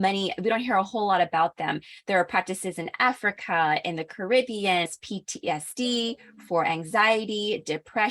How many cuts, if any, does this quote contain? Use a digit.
1